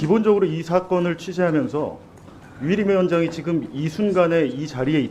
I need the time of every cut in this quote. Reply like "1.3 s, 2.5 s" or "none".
none